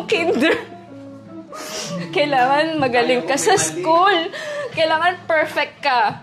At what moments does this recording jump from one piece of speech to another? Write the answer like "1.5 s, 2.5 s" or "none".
2.0 s